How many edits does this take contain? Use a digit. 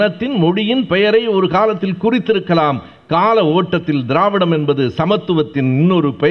0